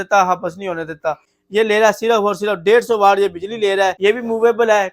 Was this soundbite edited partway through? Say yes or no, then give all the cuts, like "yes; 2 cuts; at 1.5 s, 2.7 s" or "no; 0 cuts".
yes; 2 cuts; at 1.3 s, 4.0 s